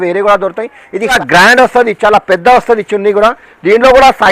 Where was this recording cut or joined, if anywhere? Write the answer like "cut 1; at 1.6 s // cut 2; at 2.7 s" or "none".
cut 1; at 1.2 s